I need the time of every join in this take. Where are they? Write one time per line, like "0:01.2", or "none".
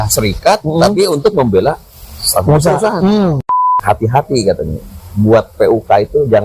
0:03.4